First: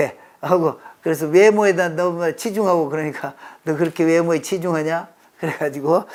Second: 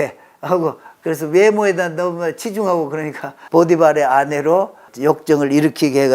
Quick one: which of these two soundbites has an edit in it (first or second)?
second